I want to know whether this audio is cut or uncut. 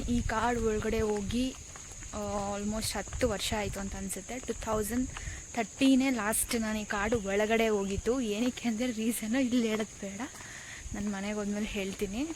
uncut